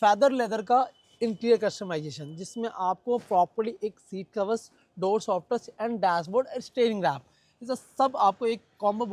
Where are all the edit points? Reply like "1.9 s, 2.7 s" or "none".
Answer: none